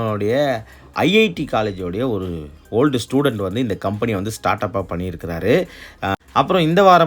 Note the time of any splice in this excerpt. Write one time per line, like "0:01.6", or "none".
0:06.1